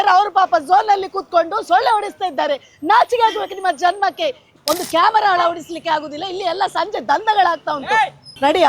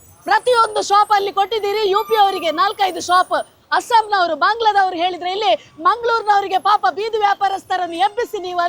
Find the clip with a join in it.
first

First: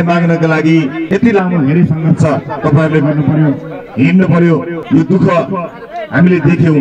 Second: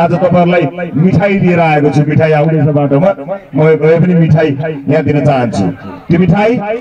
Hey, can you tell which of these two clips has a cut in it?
first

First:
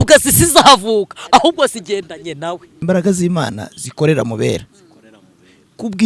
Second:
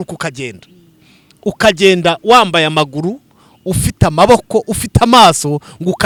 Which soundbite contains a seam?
first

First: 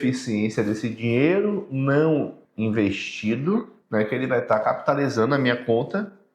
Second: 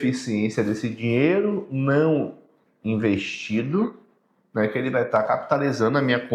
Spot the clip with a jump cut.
first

